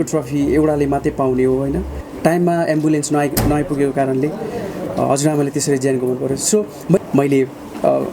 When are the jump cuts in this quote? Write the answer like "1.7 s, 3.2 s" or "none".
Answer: 2.0 s, 7.0 s